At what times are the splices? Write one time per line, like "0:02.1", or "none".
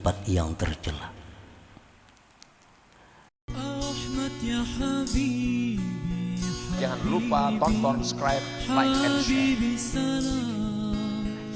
0:03.3